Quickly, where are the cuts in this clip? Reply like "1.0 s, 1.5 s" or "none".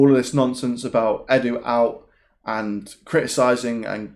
none